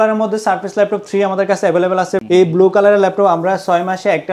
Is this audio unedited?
no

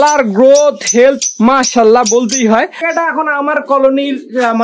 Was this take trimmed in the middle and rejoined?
yes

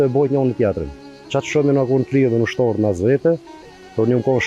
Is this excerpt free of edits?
yes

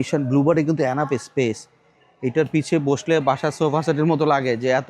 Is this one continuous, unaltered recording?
yes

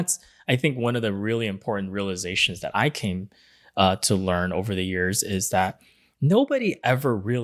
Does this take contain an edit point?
no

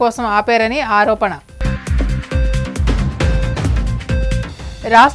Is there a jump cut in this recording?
no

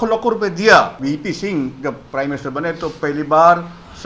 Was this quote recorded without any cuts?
no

